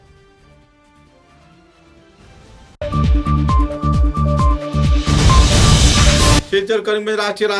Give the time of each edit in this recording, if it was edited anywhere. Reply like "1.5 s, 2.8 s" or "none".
6.4 s

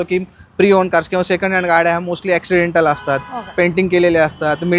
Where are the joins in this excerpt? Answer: none

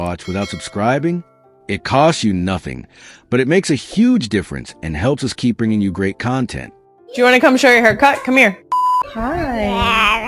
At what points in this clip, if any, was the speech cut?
7.1 s

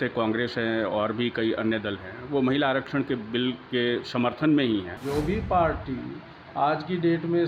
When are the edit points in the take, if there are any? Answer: 4.9 s

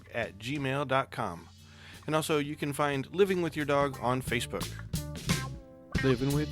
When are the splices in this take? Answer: 4.7 s

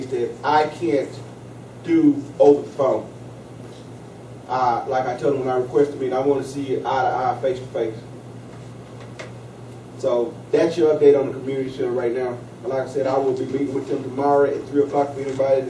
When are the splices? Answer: 14.6 s

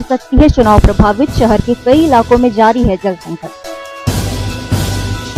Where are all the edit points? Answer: none

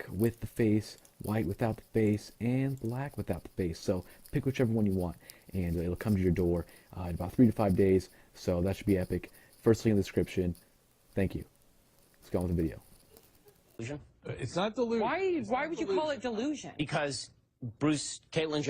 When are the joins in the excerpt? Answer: 10.0 s

